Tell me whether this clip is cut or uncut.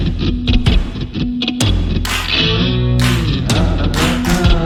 uncut